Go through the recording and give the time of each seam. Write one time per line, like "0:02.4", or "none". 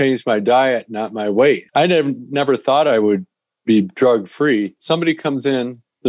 0:01.6
0:04.8